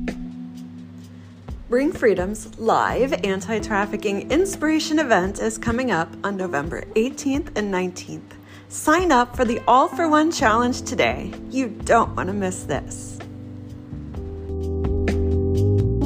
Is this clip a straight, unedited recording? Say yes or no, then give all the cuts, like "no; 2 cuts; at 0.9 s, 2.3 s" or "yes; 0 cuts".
yes; 0 cuts